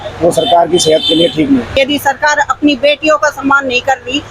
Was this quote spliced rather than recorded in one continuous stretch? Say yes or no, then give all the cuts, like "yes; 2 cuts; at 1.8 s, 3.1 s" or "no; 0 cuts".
yes; 1 cut; at 1.7 s